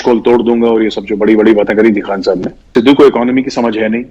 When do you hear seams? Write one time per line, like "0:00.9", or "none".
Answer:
0:02.5